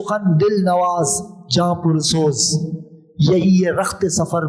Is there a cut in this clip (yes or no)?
no